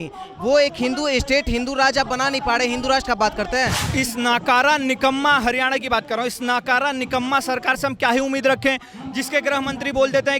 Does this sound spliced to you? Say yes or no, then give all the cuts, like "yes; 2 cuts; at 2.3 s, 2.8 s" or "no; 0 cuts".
yes; 1 cut; at 3.8 s